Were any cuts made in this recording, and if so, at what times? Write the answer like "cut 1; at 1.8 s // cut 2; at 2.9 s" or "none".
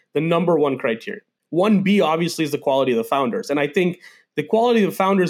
cut 1; at 1.3 s